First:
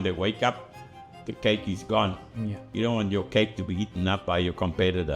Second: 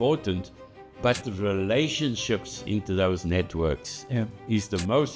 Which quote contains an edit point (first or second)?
first